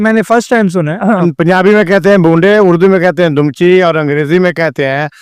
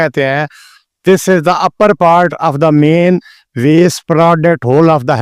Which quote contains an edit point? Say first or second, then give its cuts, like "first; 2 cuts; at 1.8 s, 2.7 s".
first; 1 cut; at 1.2 s